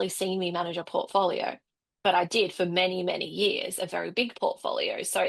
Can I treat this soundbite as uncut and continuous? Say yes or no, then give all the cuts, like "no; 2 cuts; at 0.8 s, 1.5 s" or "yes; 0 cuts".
yes; 0 cuts